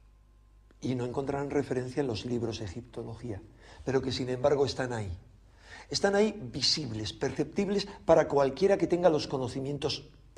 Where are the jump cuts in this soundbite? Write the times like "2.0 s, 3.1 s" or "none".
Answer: 7.1 s

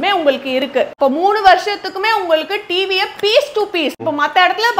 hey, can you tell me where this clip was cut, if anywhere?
0.9 s, 4.0 s

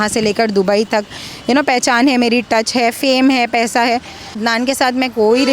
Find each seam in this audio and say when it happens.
4.4 s

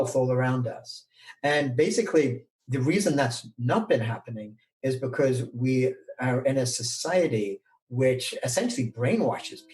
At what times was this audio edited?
6.4 s

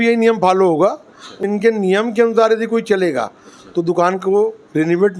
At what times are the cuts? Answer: 1.4 s

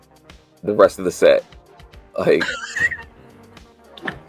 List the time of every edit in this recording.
none

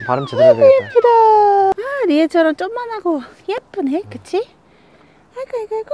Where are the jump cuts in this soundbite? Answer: 1.7 s

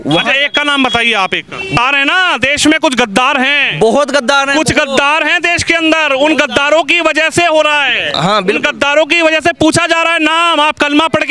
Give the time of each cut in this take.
1.8 s

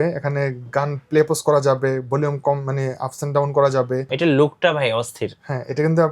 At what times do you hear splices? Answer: 4.1 s

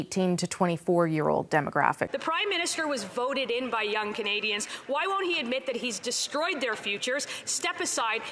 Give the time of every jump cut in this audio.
2.1 s

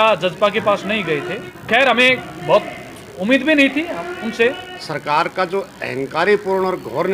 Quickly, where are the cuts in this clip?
1.5 s, 4.9 s

